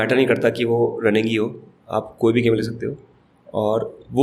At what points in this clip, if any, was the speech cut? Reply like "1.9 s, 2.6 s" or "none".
none